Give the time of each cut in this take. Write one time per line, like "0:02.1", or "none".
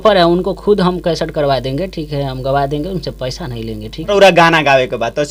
0:04.1